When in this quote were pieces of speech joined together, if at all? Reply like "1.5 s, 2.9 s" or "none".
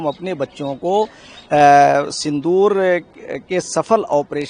none